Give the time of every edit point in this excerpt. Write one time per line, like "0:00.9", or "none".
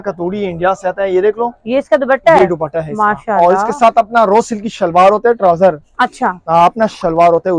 none